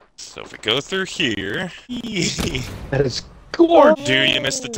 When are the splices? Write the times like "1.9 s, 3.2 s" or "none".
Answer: 1.9 s, 3.9 s